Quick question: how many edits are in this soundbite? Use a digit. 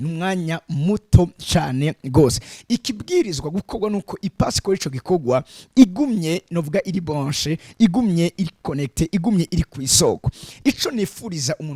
0